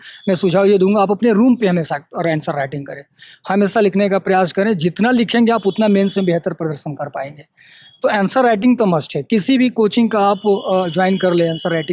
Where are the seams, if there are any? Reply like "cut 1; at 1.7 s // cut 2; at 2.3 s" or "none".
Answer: none

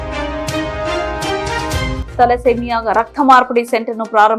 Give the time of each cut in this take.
none

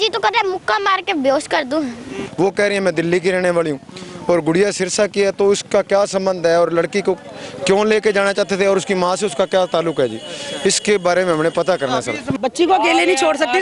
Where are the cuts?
cut 1; at 2.2 s // cut 2; at 12.3 s

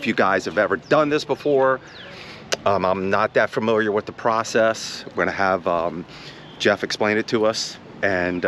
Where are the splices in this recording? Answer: none

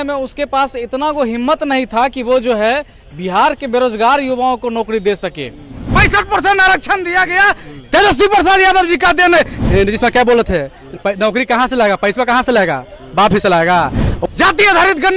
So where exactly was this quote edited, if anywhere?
cut 1; at 5.8 s // cut 2; at 9.5 s // cut 3; at 14.1 s

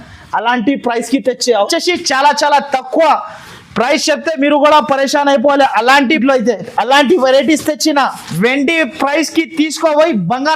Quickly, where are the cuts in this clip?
cut 1; at 1.7 s // cut 2; at 6.2 s

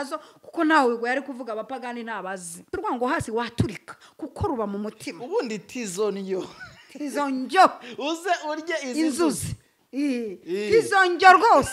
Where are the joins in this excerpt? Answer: cut 1; at 2.7 s

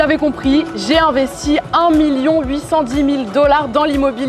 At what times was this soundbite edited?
none

